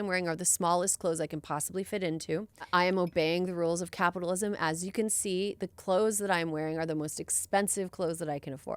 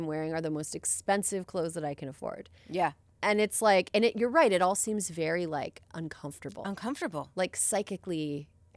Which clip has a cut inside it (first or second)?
first